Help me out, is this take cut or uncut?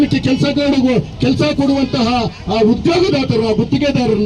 uncut